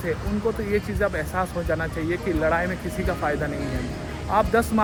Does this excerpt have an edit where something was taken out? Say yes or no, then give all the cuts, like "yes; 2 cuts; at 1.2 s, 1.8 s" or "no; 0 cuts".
no; 0 cuts